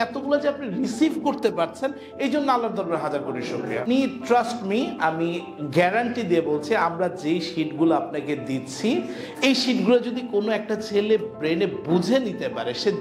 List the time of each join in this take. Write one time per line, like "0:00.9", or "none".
0:03.8